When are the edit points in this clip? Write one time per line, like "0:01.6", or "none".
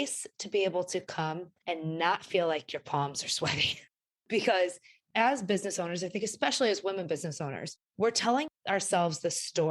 0:08.5